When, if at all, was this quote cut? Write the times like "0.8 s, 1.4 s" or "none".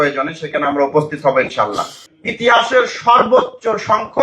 1.9 s